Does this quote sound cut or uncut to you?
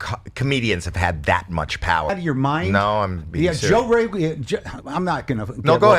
cut